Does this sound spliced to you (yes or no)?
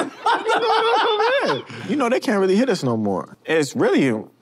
yes